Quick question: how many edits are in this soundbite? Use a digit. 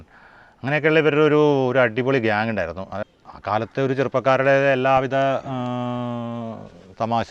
1